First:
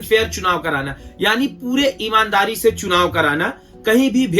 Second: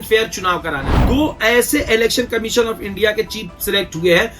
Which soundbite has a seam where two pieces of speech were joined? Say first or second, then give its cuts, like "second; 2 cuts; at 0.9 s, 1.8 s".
second; 1 cut; at 1.0 s